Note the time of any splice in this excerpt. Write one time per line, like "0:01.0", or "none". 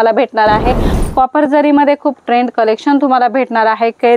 0:00.9